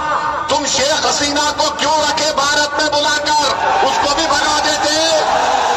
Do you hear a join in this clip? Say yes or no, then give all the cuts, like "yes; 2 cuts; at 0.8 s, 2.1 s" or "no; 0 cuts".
no; 0 cuts